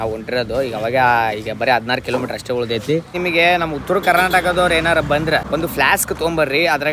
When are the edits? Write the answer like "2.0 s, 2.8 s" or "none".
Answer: 3.1 s, 5.4 s